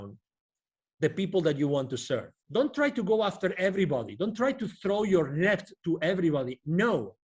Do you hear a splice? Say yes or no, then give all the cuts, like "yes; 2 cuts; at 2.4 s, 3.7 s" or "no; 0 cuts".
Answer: yes; 1 cut; at 2.4 s